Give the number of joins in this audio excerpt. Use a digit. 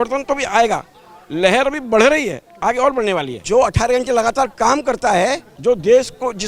2